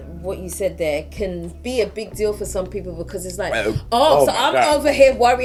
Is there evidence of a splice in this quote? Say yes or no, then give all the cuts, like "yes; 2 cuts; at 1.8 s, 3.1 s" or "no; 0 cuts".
no; 0 cuts